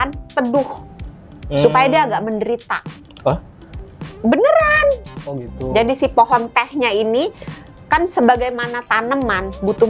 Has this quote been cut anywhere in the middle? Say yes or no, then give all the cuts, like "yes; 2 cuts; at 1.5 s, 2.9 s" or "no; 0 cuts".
no; 0 cuts